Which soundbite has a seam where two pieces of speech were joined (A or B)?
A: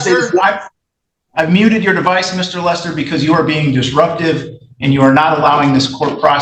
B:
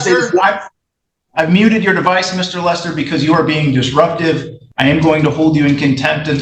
B